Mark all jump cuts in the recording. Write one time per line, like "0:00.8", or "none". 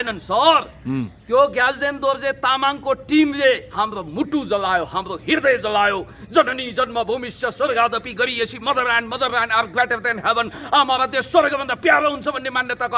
none